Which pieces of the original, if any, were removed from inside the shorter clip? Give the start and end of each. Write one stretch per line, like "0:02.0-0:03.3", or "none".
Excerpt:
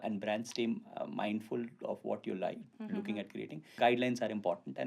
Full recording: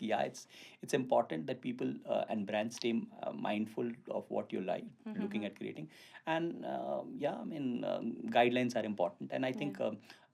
0:06.0-0:08.3